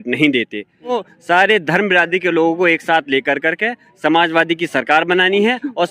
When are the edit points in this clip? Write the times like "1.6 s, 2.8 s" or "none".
0.9 s